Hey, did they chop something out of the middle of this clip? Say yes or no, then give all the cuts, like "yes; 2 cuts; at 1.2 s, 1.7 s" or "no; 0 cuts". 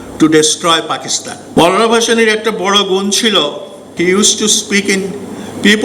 yes; 1 cut; at 1.5 s